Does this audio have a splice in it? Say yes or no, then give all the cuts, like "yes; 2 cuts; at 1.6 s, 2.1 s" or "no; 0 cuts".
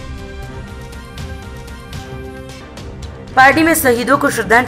yes; 1 cut; at 2.7 s